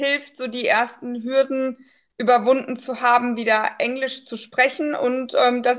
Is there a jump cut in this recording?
no; 0 cuts

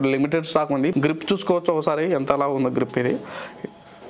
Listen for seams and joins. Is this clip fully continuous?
no; 1 cut; at 0.9 s

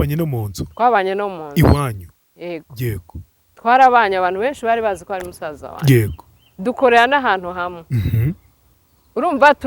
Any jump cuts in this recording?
yes; 1 cut; at 2.4 s

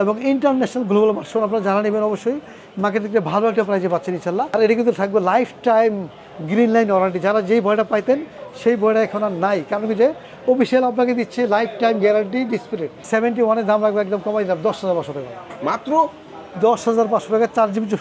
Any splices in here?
yes; 2 cuts; at 4.5 s, 13.0 s

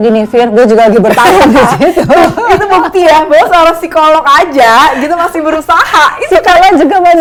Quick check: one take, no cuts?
yes; 0 cuts

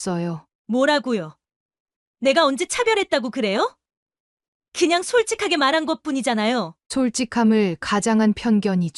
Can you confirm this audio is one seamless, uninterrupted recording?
yes; 0 cuts

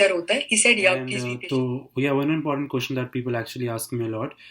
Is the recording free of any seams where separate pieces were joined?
no; 1 cut; at 1.3 s

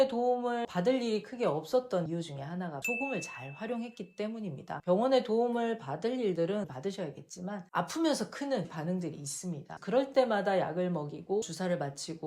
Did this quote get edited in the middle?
yes; 3 cuts; at 4.8 s, 7.6 s, 11.4 s

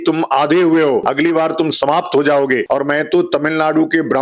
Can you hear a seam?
yes; 2 cuts; at 1.1 s, 2.6 s

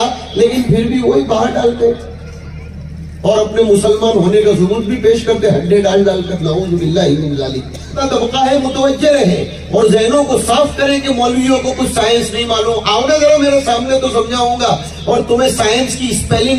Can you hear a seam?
yes; 1 cut; at 8.0 s

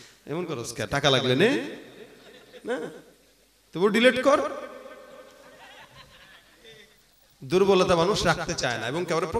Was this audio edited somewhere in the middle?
no; 0 cuts

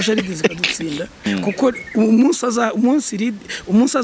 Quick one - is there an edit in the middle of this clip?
yes; 1 cut; at 1.3 s

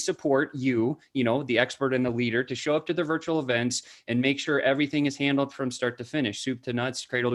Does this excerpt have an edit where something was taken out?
no; 0 cuts

